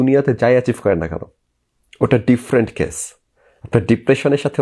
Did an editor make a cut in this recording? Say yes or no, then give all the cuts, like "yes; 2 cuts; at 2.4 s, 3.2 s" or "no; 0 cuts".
no; 0 cuts